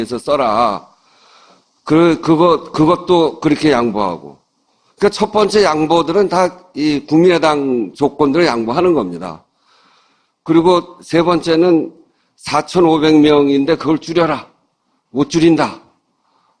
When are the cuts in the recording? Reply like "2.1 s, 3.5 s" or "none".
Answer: 15.1 s